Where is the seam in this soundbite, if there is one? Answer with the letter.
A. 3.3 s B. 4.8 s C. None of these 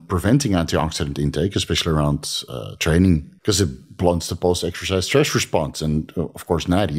A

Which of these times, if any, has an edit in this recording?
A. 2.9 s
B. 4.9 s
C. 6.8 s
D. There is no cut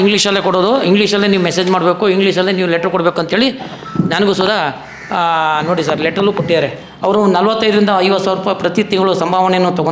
C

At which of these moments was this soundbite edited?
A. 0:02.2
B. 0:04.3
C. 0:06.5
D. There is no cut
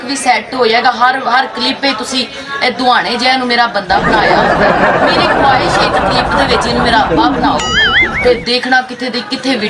D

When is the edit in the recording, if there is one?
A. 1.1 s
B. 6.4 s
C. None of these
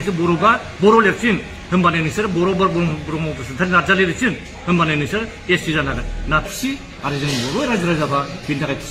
B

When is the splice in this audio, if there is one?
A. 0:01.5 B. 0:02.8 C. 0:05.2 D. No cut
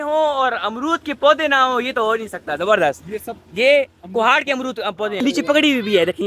C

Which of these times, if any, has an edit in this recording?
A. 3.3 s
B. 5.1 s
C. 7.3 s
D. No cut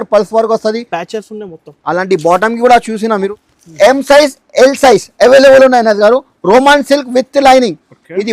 A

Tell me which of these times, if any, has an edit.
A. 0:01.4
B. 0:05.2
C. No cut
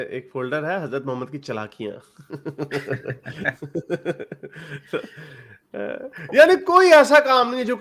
C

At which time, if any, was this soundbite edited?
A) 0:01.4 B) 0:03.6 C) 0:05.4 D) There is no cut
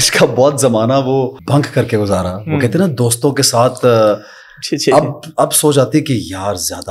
A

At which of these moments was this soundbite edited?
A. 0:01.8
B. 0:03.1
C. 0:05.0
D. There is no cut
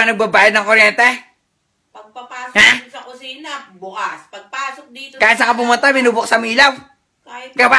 B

